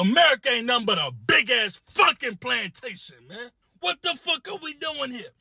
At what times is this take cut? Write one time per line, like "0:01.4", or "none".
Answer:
0:03.6